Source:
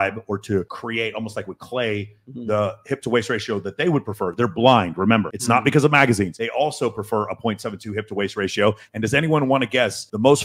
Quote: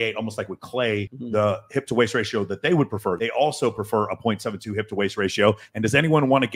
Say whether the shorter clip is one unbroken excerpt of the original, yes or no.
no